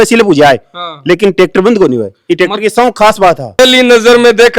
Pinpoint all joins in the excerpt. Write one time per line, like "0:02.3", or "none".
0:03.6